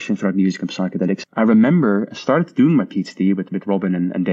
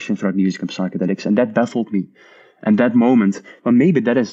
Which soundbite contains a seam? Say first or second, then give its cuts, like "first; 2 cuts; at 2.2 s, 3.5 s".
first; 1 cut; at 1.2 s